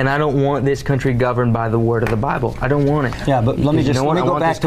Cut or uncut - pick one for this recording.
uncut